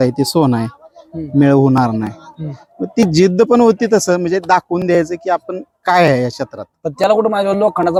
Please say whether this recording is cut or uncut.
uncut